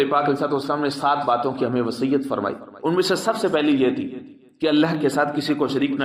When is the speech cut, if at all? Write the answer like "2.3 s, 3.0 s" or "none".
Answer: none